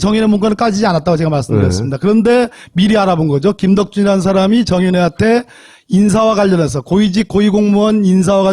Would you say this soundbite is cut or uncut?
uncut